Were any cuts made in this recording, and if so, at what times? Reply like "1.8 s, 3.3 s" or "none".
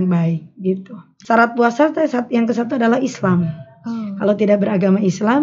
1.1 s